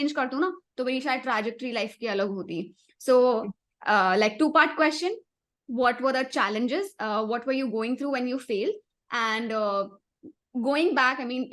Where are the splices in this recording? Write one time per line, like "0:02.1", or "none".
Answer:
none